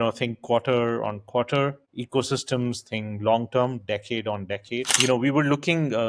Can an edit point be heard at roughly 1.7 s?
no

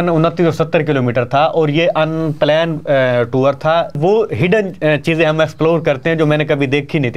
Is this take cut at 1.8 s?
no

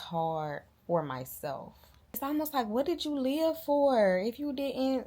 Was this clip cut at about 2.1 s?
yes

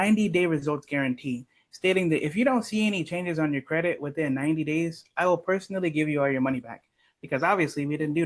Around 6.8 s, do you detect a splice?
no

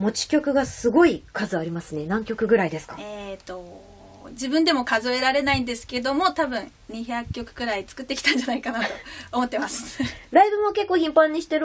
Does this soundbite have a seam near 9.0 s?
yes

